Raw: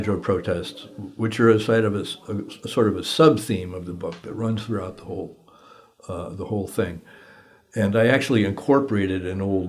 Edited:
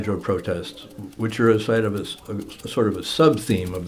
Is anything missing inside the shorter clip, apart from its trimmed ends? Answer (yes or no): no